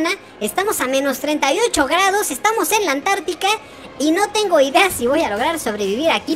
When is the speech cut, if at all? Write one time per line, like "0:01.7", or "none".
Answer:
none